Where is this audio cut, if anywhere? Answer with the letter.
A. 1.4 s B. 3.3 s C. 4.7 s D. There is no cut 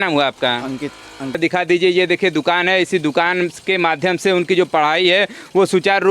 A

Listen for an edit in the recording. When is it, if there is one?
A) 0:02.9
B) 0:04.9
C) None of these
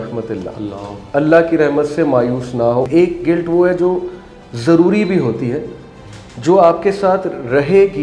A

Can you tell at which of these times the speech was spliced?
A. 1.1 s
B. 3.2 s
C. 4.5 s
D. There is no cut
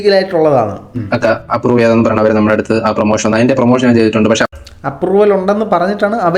A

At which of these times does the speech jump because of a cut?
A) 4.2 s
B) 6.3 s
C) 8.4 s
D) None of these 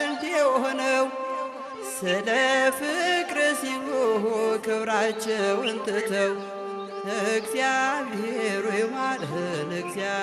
D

